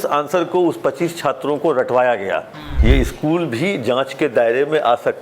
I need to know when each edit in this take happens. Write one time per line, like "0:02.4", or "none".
0:02.7